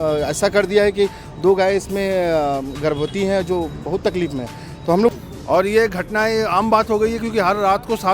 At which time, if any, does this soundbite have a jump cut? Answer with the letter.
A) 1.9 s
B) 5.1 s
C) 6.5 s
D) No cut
B